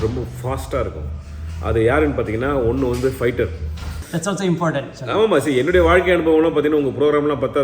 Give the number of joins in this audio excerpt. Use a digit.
1